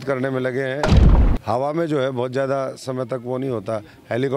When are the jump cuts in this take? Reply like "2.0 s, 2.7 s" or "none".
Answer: 1.1 s